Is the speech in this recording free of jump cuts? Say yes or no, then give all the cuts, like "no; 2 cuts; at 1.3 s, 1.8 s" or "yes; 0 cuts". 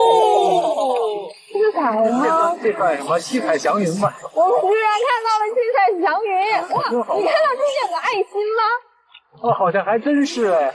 yes; 0 cuts